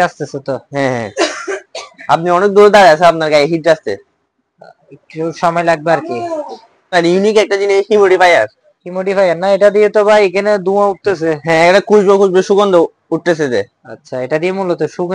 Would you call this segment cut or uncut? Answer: cut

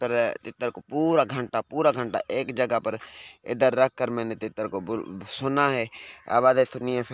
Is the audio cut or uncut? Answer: uncut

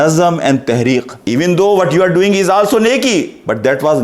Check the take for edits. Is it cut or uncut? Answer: cut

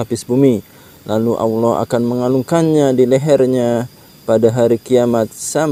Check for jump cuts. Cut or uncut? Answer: uncut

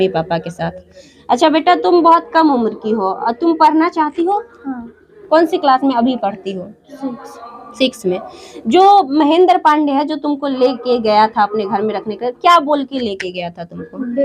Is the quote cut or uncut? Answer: uncut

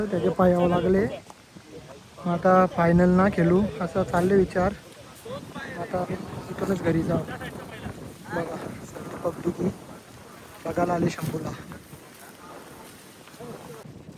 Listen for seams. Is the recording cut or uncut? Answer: uncut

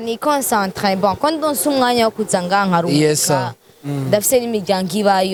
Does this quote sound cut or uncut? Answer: uncut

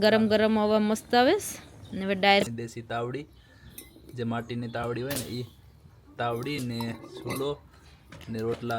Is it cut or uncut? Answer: cut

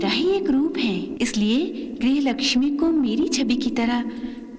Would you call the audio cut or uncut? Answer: cut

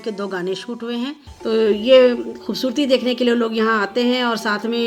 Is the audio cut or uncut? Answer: cut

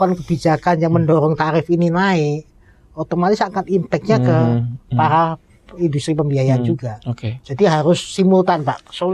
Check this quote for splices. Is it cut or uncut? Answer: uncut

